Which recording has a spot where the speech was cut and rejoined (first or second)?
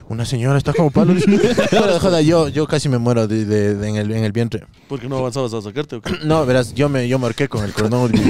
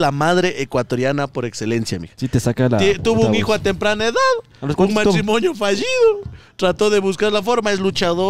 first